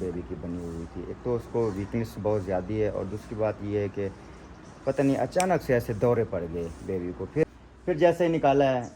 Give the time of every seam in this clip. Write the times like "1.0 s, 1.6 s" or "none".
7.4 s